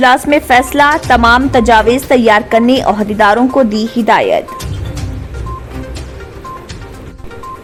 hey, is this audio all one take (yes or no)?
yes